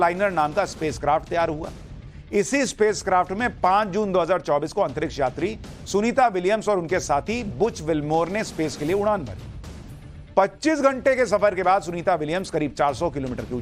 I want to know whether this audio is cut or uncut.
uncut